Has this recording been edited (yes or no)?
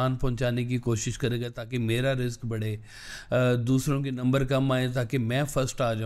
no